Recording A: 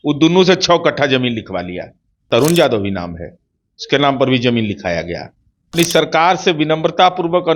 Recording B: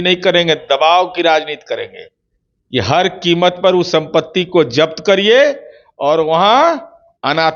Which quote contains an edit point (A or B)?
A